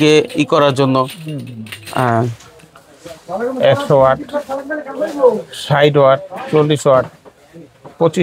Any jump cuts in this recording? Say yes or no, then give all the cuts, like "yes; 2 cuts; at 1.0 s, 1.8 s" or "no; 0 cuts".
yes; 1 cut; at 2.5 s